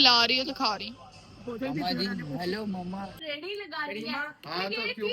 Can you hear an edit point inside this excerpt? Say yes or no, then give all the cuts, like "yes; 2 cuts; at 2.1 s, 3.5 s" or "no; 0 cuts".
yes; 1 cut; at 3.2 s